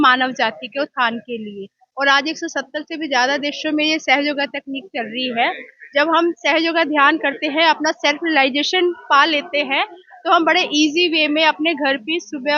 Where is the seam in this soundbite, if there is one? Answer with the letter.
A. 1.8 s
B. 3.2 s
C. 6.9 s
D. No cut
D